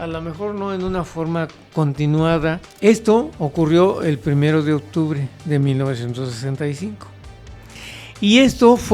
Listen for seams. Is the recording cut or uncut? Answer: cut